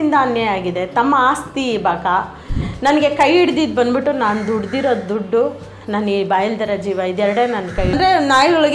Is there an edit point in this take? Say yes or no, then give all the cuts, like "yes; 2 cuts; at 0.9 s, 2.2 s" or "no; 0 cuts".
yes; 2 cuts; at 2.6 s, 8.0 s